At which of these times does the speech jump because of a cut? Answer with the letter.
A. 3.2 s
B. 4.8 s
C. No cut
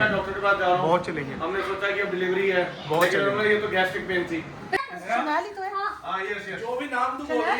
B